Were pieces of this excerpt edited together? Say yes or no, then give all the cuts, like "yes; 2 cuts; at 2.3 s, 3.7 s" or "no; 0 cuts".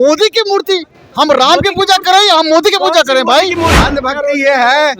yes; 1 cut; at 3.8 s